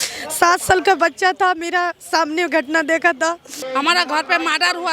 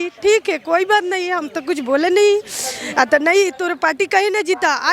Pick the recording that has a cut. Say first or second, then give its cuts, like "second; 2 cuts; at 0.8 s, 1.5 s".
first; 1 cut; at 3.5 s